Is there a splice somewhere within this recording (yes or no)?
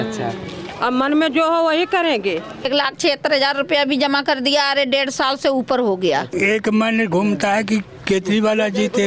yes